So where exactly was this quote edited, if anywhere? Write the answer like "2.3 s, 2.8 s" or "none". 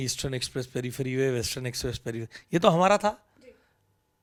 none